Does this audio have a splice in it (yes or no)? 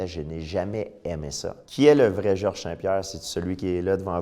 yes